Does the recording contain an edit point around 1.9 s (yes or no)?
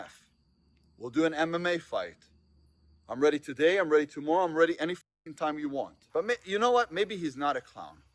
no